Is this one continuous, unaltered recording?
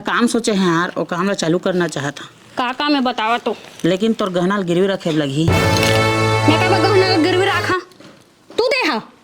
yes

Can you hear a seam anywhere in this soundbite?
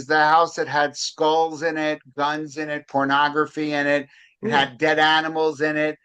no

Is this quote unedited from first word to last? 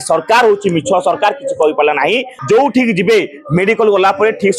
no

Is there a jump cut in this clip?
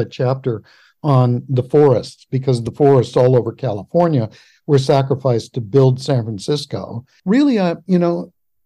yes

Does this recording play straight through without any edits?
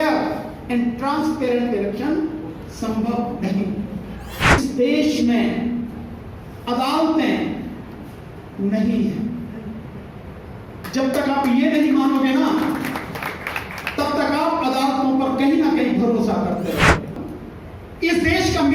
no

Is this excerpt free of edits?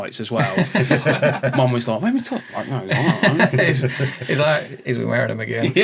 yes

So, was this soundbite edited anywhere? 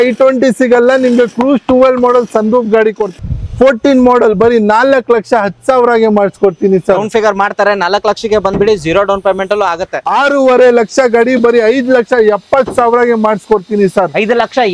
yes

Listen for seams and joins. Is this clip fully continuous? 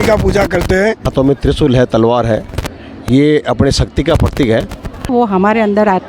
no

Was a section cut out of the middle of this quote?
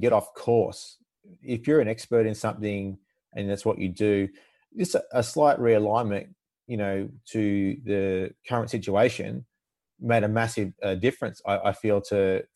no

